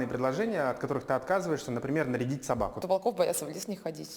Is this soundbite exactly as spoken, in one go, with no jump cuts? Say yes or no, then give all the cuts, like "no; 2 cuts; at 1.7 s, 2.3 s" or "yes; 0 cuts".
no; 1 cut; at 2.8 s